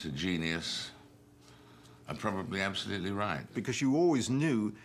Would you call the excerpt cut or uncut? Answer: cut